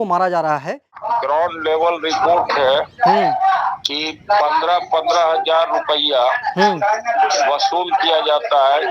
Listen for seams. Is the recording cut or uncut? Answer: cut